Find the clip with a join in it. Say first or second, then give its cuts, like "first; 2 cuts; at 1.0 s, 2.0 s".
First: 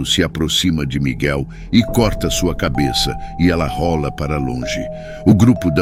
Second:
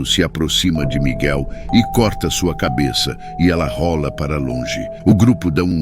second; 1 cut; at 4.8 s